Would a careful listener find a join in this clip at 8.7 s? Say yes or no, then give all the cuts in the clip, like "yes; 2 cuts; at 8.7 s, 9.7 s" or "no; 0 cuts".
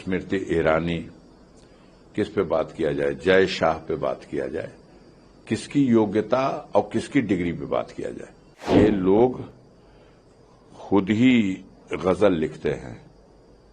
yes; 1 cut; at 8.7 s